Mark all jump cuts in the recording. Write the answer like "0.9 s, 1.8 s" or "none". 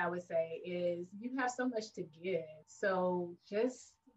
2.6 s